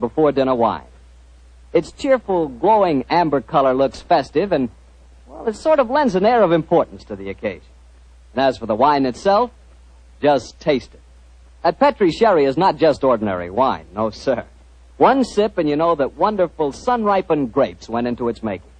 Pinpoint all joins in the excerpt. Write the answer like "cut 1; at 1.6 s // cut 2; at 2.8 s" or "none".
cut 1; at 11.9 s